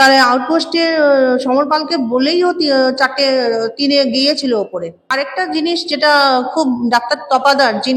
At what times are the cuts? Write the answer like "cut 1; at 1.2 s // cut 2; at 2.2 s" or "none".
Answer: cut 1; at 5.0 s